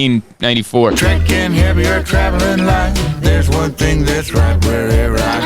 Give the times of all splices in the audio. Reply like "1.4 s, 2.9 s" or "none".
1.0 s